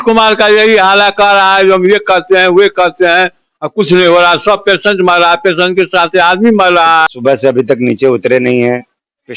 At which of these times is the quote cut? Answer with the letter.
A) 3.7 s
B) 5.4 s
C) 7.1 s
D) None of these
C